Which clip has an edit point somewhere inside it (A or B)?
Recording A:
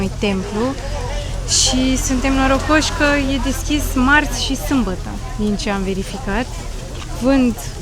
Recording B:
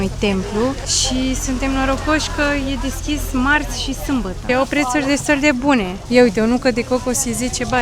B